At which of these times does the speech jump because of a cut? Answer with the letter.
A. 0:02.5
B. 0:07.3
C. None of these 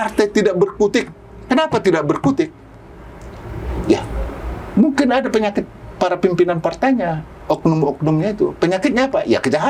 C